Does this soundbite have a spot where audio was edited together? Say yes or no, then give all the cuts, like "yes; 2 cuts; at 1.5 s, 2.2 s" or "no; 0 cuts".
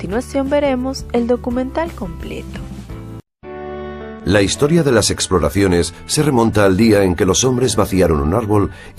yes; 1 cut; at 4.1 s